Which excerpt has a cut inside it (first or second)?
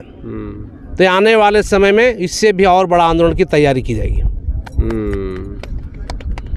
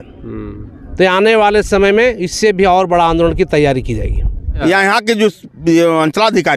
second